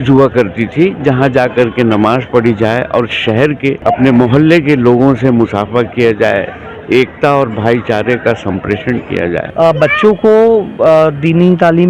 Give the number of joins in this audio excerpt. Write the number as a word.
two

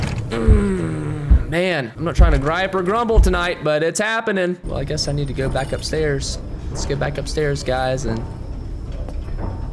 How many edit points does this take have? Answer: one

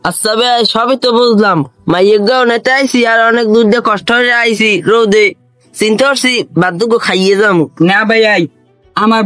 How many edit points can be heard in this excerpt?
zero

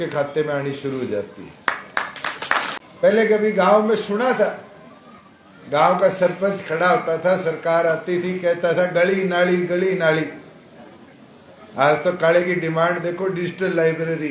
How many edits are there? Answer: one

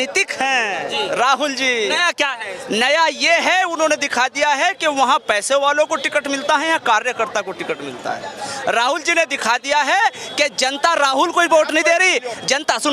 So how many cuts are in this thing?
zero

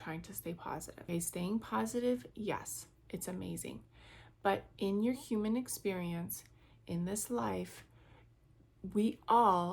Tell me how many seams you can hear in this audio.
one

